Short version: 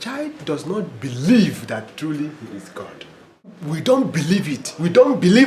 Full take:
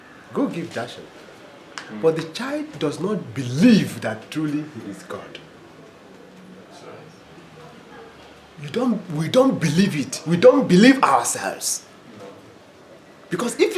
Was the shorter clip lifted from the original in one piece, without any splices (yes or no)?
no